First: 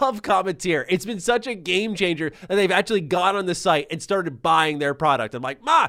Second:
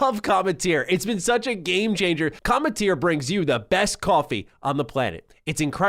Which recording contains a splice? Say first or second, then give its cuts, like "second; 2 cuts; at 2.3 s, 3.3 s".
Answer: second; 1 cut; at 2.4 s